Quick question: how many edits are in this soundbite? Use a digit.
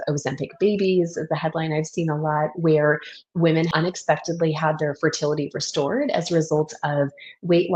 1